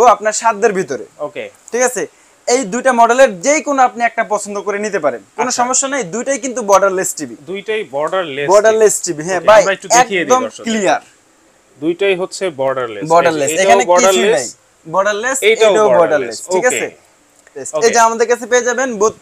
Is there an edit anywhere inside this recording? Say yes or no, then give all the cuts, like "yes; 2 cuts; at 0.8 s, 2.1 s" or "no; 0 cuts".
yes; 1 cut; at 17.6 s